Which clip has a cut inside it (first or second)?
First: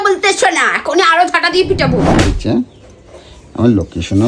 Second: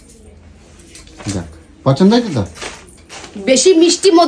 first